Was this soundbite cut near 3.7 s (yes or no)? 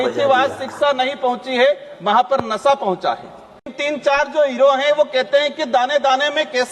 yes